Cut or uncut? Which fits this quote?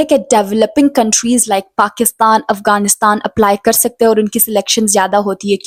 uncut